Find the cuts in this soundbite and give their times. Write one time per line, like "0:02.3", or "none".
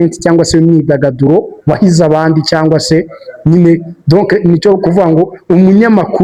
none